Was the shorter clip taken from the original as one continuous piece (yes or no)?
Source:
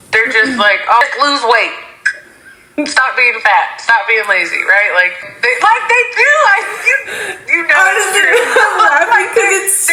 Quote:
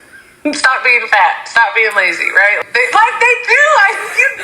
no